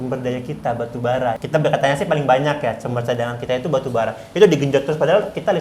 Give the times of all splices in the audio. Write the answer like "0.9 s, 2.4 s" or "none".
1.4 s